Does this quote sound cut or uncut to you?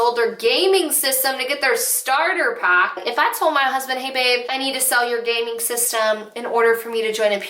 cut